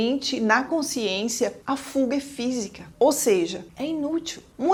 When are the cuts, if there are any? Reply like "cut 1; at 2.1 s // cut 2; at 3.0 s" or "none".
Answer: none